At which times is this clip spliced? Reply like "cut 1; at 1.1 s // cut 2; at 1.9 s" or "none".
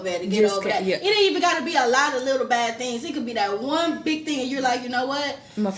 none